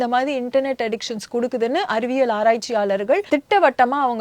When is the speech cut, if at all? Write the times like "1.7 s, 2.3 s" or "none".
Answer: 3.2 s